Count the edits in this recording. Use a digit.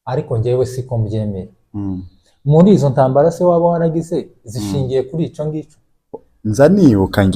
1